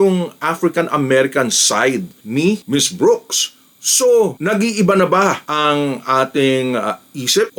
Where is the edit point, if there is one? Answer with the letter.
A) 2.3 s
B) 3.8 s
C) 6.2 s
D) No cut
D